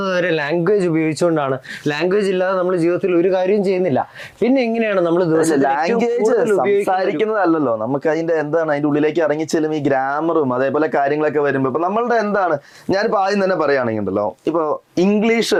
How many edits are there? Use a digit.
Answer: 0